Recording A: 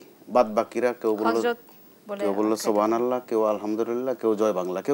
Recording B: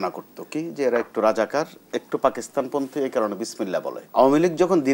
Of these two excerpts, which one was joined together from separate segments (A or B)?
B